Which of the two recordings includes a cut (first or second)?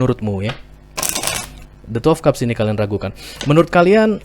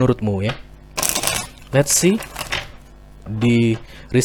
first